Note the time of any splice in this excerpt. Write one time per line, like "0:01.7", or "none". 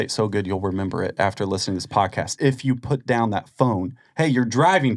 none

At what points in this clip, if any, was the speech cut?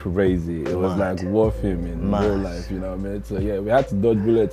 none

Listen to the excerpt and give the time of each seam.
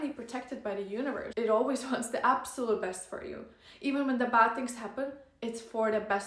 0:01.3

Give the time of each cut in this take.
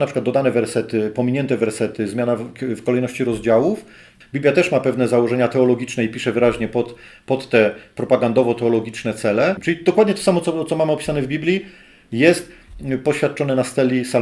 0:04.1
0:09.6

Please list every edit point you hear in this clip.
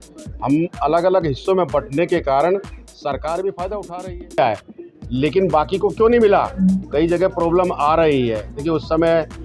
0:04.4

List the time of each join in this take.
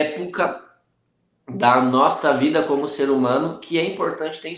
none

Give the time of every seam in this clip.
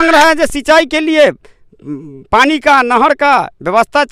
none

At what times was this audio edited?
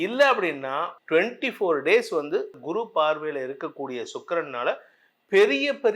0:00.9
0:02.6

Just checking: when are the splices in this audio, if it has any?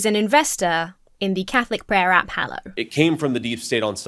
0:02.7

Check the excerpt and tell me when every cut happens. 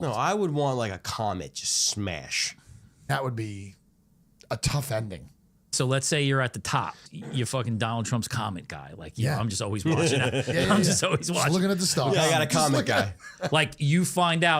0:03.0
0:05.7
0:07.0

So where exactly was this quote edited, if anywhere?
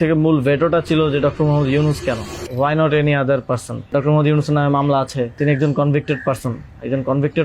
0:02.4
0:03.9
0:05.4

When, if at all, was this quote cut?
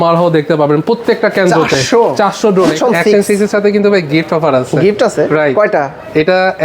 0:02.8

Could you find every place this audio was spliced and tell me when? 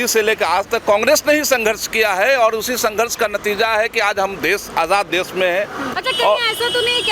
none

